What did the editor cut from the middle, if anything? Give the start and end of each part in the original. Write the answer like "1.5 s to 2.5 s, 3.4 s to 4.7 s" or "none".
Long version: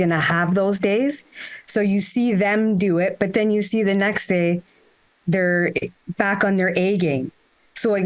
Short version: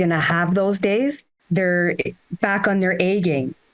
1.3 s to 5.1 s